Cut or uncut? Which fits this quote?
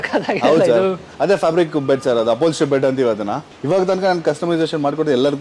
cut